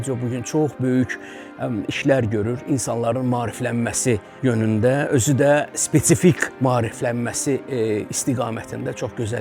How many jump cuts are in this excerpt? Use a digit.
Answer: 2